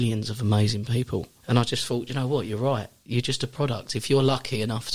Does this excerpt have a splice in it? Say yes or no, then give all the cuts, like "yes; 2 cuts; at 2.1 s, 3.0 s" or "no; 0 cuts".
yes; 1 cut; at 1.3 s